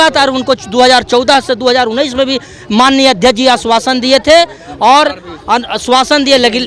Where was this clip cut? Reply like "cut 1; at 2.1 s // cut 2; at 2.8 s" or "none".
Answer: none